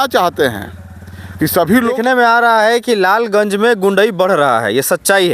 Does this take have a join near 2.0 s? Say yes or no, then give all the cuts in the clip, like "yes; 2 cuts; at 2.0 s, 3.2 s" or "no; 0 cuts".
yes; 1 cut; at 2.0 s